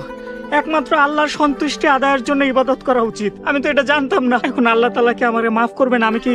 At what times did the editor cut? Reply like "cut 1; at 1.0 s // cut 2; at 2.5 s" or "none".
cut 1; at 3.4 s // cut 2; at 4.4 s